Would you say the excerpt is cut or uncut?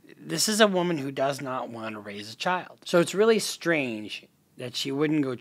cut